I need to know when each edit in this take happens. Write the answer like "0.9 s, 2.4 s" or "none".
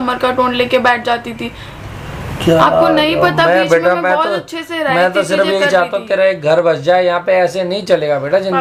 none